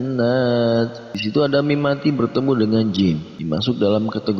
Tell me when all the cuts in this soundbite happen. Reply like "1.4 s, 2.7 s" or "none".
1.1 s, 3.3 s